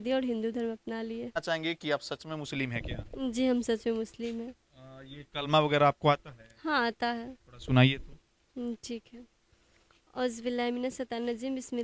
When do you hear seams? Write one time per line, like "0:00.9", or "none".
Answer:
0:01.4